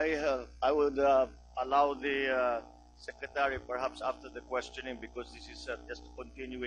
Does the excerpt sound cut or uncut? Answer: uncut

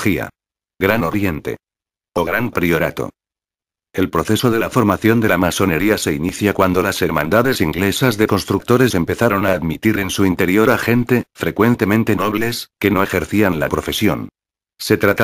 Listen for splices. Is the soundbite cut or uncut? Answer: uncut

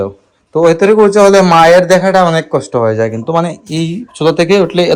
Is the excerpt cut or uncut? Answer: uncut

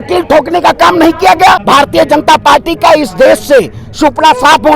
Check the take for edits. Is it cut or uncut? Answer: cut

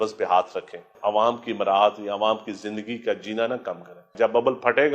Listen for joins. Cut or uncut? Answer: cut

